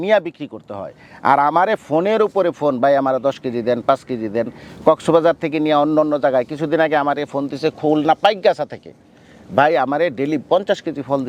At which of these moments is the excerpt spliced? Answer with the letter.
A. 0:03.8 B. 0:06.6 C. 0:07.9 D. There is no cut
D